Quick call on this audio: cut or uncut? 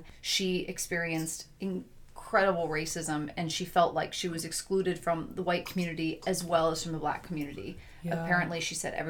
uncut